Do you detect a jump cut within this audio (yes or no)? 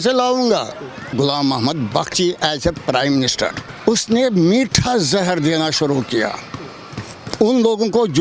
yes